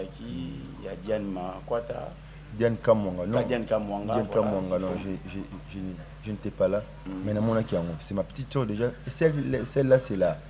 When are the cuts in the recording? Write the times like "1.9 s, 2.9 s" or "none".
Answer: none